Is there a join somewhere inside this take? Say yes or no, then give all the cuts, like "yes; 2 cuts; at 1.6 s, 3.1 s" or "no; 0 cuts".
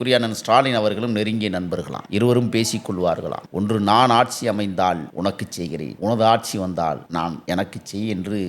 no; 0 cuts